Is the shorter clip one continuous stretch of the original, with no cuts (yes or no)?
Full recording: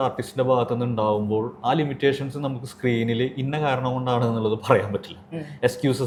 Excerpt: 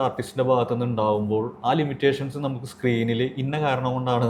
yes